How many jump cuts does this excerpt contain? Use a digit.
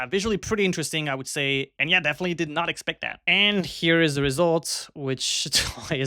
1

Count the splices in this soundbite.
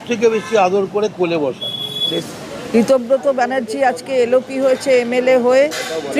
1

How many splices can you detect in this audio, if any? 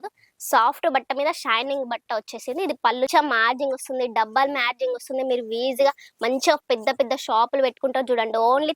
1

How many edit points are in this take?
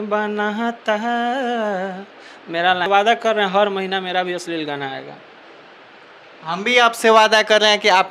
1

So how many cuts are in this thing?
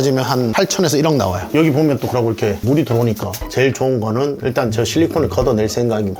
2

